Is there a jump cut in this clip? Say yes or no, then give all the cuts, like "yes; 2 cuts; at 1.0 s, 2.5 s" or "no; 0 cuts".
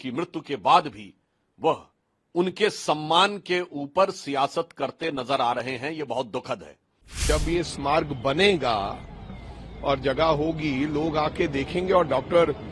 yes; 1 cut; at 7.1 s